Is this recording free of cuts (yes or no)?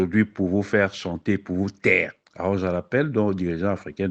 no